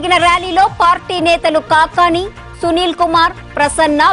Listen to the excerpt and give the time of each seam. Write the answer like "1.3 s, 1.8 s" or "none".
none